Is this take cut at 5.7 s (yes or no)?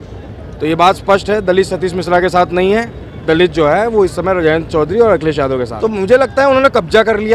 yes